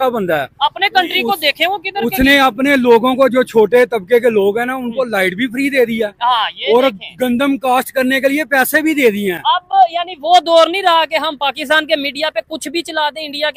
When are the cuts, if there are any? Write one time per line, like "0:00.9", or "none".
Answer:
none